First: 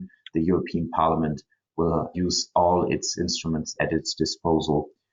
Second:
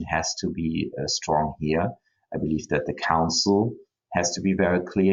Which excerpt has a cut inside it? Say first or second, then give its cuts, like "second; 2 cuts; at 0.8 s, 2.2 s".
first; 2 cuts; at 2.1 s, 3.7 s